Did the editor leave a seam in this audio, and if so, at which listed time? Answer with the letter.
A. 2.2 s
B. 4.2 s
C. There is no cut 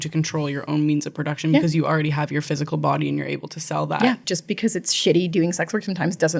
B